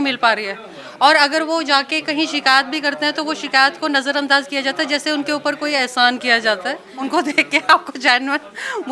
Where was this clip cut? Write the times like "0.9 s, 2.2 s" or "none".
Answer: 6.9 s